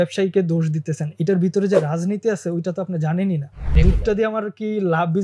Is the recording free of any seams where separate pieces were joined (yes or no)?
no